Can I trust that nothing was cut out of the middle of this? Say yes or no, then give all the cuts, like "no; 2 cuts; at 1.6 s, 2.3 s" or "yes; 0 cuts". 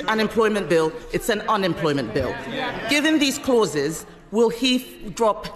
yes; 0 cuts